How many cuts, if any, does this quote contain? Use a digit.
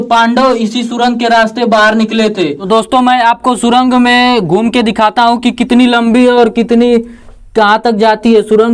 1